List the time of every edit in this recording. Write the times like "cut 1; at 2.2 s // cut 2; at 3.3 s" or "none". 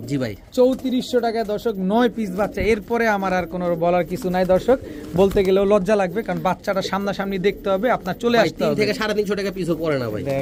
none